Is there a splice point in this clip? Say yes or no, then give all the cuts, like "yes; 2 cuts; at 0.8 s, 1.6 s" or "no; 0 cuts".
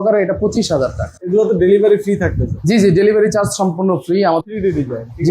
yes; 2 cuts; at 1.3 s, 4.4 s